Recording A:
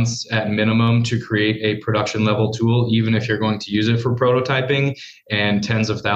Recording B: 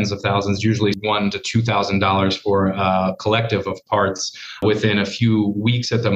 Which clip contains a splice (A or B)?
B